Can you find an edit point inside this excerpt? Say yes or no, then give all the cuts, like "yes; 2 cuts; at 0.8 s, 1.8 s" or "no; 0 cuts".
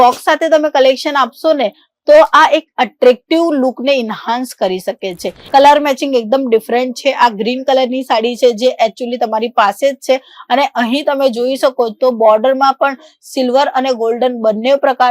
yes; 1 cut; at 5.3 s